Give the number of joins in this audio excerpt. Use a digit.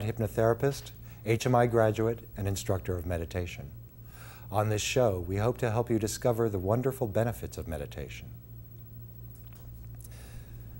1